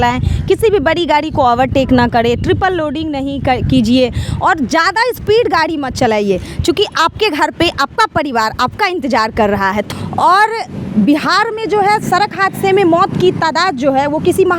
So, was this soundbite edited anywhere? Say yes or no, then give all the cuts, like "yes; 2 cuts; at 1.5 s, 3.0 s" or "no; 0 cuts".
yes; 1 cut; at 9.9 s